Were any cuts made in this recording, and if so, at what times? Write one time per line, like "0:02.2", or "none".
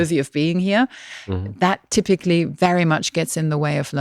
none

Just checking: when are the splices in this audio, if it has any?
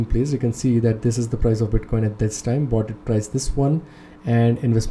none

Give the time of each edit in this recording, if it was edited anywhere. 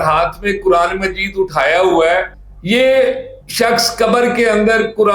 0:02.4

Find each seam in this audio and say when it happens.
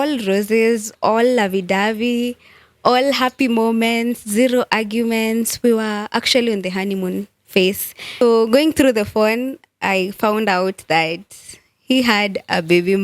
0:08.2

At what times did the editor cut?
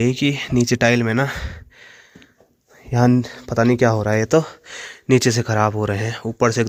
none

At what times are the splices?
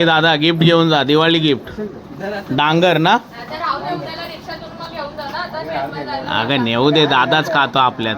none

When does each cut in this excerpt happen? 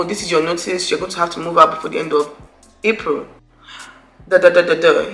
none

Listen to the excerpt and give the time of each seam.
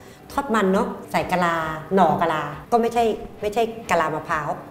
0:01.0

